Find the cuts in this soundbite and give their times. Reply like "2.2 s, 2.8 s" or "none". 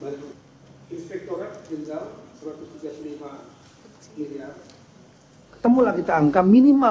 5.6 s